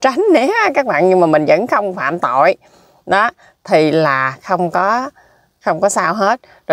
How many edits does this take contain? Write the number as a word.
zero